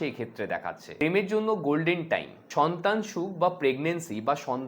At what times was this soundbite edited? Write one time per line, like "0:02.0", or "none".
0:01.0
0:02.4

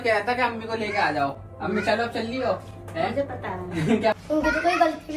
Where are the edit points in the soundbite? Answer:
0:04.2

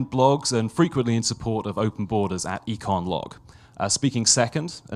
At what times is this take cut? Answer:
0:01.4

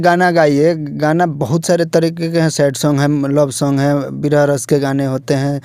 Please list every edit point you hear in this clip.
none

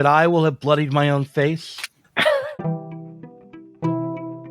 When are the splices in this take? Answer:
0:02.5

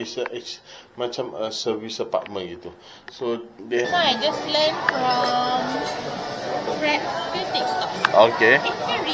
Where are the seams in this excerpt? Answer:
0:03.9

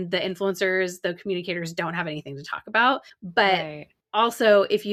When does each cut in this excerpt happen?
none

